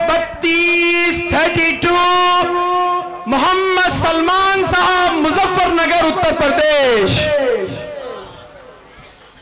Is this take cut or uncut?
uncut